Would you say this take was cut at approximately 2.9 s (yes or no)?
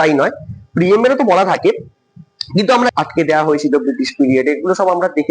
yes